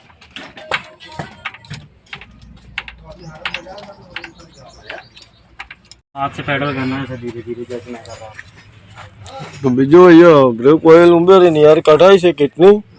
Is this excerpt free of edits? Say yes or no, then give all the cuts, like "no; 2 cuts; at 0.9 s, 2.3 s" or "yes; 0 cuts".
no; 1 cut; at 6.0 s